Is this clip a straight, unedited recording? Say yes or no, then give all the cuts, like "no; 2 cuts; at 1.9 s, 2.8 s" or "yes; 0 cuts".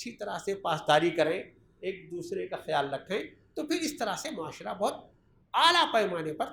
yes; 0 cuts